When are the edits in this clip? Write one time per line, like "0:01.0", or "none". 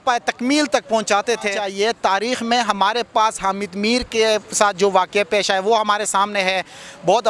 0:01.6

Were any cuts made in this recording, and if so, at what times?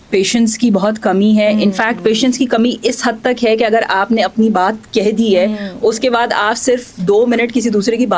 none

